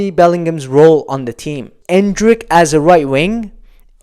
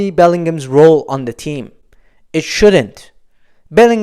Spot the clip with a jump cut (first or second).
first